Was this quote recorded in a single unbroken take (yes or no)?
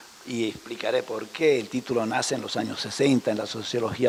yes